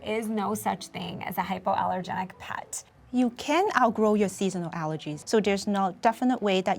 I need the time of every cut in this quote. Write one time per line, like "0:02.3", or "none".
0:02.7
0:05.1